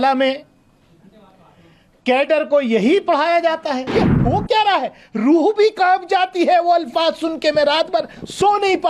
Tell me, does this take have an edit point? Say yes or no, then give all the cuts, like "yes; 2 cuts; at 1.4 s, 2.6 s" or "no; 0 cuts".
yes; 1 cut; at 3.9 s